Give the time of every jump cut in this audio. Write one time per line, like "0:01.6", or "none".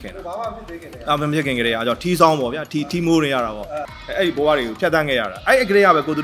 0:03.8